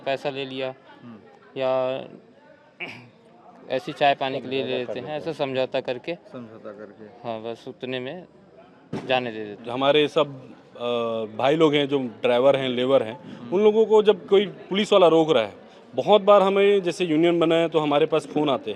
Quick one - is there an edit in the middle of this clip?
yes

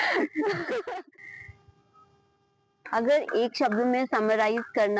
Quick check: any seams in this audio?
yes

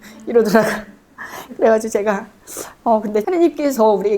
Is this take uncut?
no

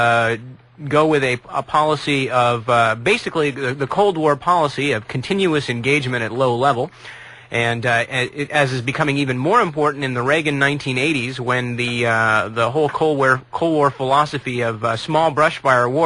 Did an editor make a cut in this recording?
no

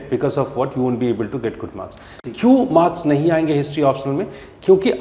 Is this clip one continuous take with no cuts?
yes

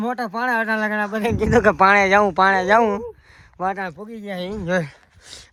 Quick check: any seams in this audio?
no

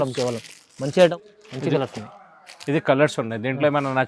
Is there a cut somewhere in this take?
yes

